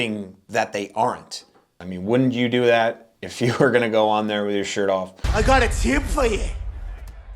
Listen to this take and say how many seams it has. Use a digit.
2